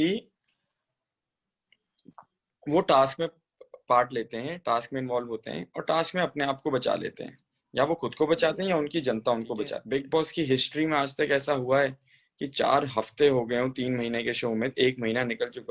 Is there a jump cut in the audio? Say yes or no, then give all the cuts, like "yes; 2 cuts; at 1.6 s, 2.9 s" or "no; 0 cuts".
yes; 1 cut; at 9.8 s